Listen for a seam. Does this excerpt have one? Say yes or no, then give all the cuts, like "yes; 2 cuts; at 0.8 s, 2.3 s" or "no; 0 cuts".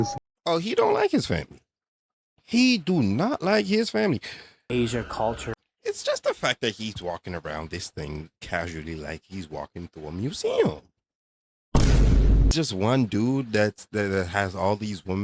yes; 2 cuts; at 4.6 s, 12.5 s